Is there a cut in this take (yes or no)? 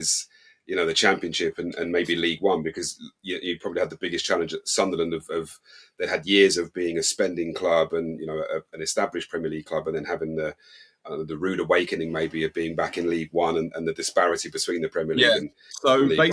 no